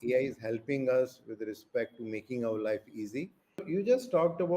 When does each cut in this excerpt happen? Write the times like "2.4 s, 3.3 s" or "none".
3.6 s